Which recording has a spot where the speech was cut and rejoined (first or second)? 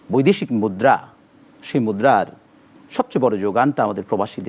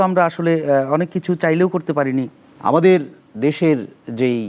second